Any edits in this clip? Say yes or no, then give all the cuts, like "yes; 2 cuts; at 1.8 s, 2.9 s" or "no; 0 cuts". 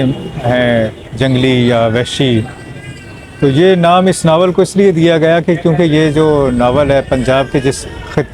no; 0 cuts